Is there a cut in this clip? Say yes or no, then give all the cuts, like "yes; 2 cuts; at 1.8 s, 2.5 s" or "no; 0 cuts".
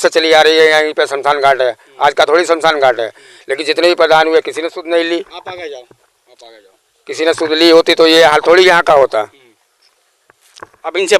no; 0 cuts